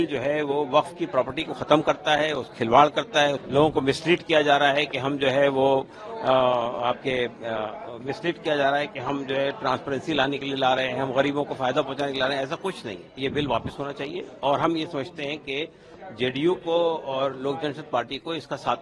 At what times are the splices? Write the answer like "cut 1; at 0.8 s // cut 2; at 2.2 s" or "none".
cut 1; at 3.4 s // cut 2; at 13.1 s